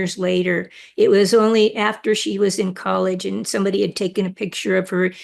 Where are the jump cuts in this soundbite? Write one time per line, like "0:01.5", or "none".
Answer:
none